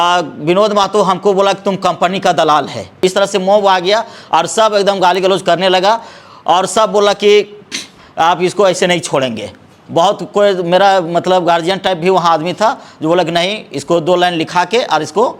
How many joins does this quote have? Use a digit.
1